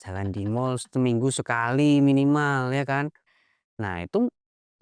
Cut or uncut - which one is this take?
uncut